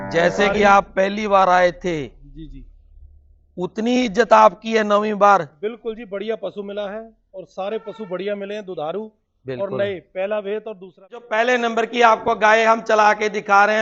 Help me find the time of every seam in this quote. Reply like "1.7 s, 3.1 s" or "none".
11.2 s